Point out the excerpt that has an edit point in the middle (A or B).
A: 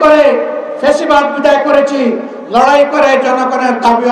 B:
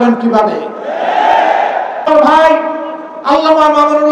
B